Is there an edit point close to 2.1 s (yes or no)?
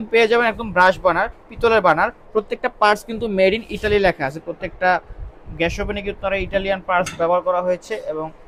no